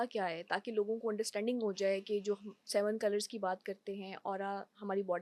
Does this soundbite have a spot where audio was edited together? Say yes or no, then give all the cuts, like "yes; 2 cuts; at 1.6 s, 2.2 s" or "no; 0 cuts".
no; 0 cuts